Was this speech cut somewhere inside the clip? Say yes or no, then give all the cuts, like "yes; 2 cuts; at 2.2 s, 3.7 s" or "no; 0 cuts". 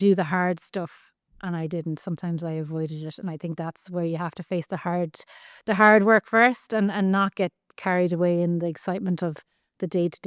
no; 0 cuts